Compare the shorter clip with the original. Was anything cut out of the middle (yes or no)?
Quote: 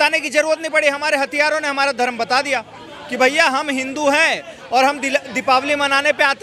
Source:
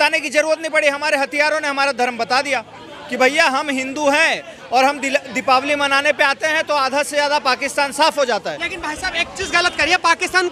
no